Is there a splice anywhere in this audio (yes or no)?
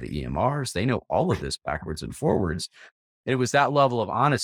no